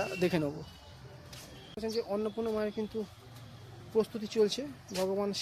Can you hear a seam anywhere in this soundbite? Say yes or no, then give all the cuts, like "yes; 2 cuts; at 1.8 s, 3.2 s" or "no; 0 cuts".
yes; 1 cut; at 1.8 s